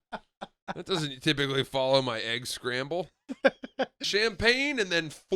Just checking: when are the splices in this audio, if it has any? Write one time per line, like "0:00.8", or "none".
0:04.0